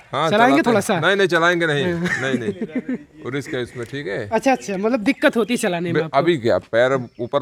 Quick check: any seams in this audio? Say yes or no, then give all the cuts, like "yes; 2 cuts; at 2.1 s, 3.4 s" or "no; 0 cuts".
no; 0 cuts